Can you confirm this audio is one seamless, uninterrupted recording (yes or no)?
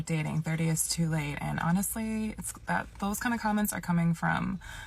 yes